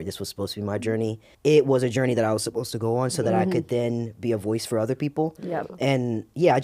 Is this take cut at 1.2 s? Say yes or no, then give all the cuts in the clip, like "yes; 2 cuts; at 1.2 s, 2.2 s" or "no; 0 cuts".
yes; 1 cut; at 1.2 s